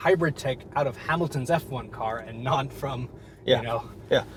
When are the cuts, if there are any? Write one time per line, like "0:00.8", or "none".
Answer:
none